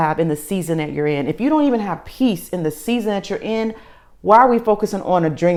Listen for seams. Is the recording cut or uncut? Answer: uncut